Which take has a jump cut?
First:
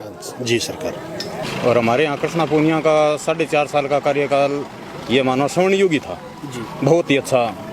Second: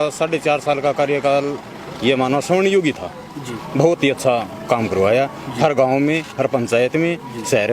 first; 1 cut; at 1.5 s

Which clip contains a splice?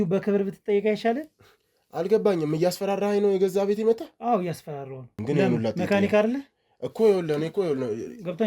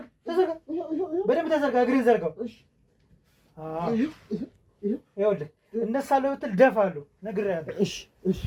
first; 1 cut; at 5.1 s

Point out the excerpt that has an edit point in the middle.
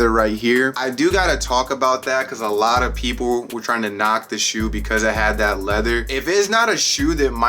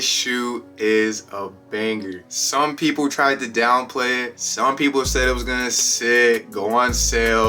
first; 1 cut; at 6.1 s

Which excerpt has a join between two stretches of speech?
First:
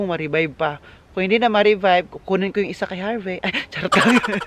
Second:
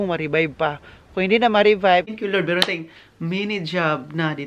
second; 1 cut; at 2.1 s

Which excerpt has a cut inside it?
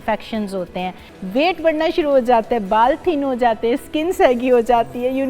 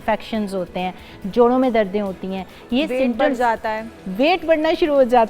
first; 1 cut; at 1.1 s

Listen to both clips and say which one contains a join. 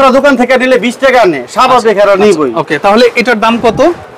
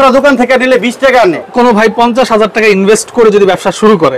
second; 1 cut; at 1.4 s

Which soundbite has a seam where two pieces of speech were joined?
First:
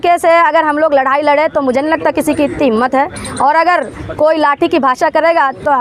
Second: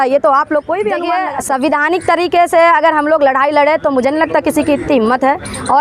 second; 1 cut; at 1.0 s

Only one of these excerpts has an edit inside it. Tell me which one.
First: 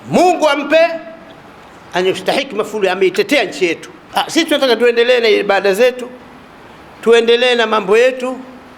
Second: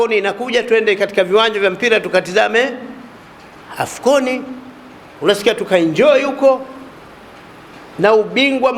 first; 1 cut; at 3.9 s

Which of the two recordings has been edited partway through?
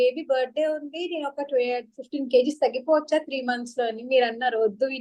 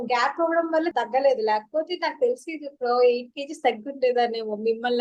second; 1 cut; at 0.9 s

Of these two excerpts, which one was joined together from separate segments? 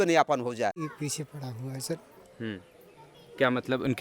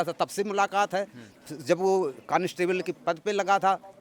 first; 1 cut; at 0.9 s

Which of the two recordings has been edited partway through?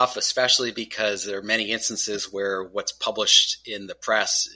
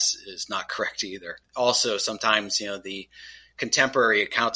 second; 1 cut; at 1.4 s

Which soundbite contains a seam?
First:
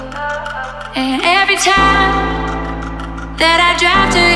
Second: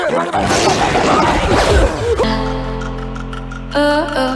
second; 1 cut; at 2.2 s

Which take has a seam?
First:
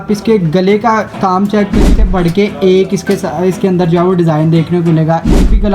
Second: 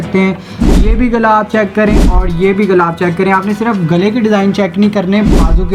first; 1 cut; at 1.9 s

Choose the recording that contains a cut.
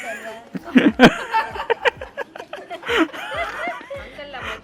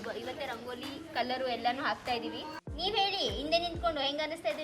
second; 1 cut; at 2.6 s

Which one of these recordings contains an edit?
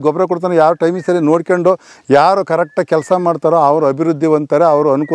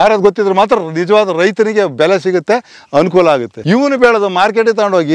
second; 1 cut; at 3.5 s

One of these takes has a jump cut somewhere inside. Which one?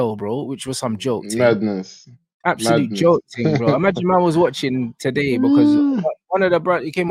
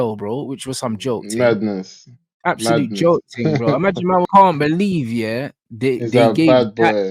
second; 1 cut; at 4.3 s

